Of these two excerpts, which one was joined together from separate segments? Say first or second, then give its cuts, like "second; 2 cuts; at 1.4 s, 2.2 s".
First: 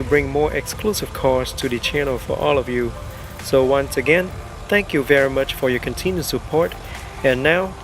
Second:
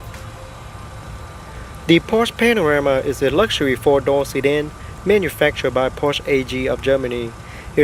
first; 1 cut; at 5.9 s